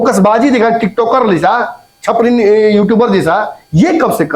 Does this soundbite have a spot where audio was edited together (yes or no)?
no